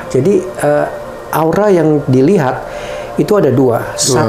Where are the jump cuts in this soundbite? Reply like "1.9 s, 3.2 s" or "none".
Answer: none